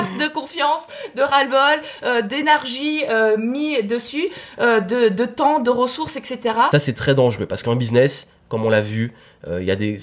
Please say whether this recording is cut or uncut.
cut